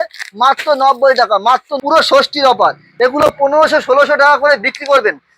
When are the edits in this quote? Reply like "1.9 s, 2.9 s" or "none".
1.7 s

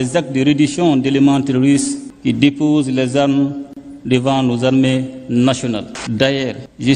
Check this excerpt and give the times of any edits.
6.0 s

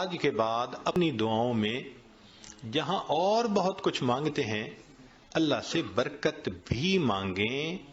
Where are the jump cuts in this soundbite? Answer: 0.9 s

